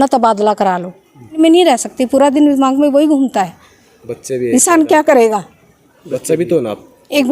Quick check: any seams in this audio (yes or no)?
yes